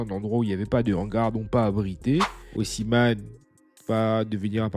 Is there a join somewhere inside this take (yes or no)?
yes